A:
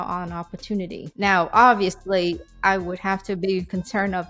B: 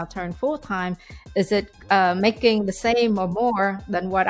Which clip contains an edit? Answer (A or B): A